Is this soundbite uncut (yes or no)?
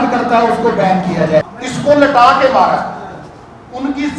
no